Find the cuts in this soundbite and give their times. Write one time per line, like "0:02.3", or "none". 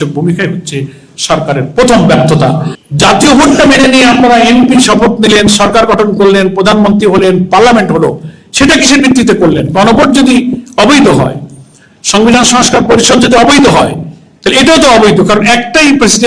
0:02.7